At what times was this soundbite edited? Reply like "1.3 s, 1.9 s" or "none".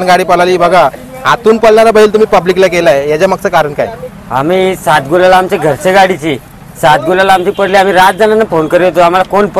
none